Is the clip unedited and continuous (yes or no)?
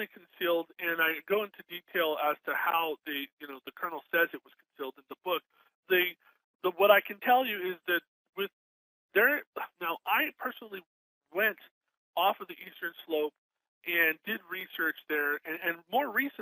yes